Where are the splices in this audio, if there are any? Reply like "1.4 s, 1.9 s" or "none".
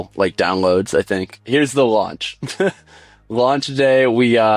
1.4 s